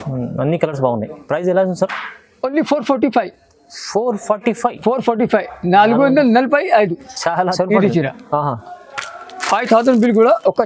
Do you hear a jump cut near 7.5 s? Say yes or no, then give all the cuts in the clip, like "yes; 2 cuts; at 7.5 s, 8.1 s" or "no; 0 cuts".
yes; 1 cut; at 7.5 s